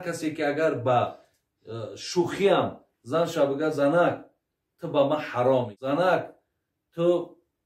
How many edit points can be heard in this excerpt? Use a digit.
1